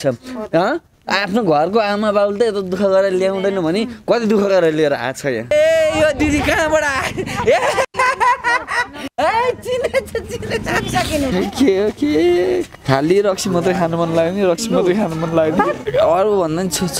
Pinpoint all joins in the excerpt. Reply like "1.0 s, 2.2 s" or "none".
5.5 s, 11.3 s, 15.8 s

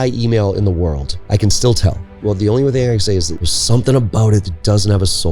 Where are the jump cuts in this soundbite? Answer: 1.1 s, 2.2 s, 3.4 s

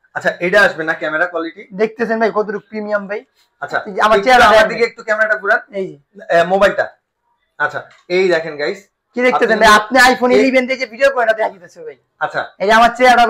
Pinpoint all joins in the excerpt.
none

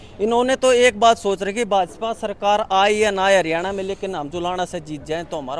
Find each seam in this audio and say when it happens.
none

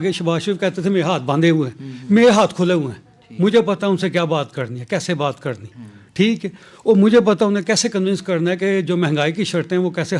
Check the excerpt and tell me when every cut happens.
none

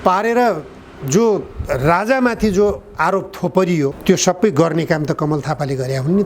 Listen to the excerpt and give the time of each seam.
4.0 s

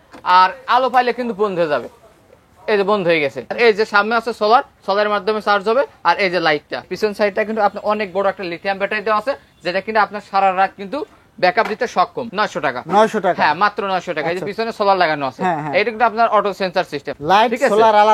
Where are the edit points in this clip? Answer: 3.6 s, 6.9 s, 12.2 s, 17.1 s

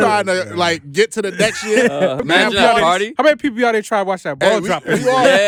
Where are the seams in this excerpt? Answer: none

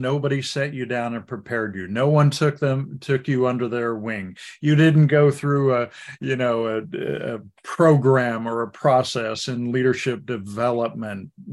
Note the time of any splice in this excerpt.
none

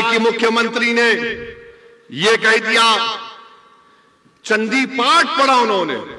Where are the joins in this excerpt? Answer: none

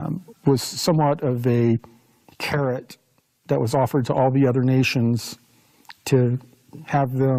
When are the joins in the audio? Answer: none

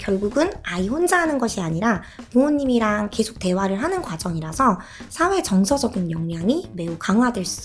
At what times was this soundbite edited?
none

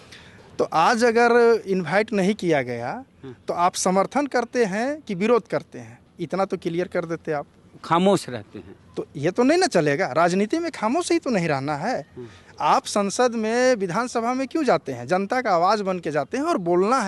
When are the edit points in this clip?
none

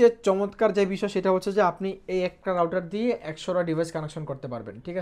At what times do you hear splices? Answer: none

